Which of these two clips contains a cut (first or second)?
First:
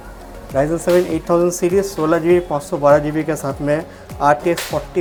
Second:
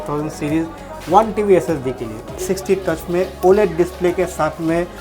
second